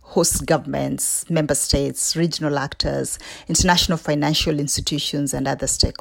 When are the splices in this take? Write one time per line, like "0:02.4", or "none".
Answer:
none